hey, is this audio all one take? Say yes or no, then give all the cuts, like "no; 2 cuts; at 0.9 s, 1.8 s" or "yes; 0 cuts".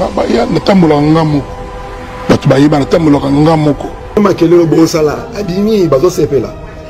no; 1 cut; at 4.2 s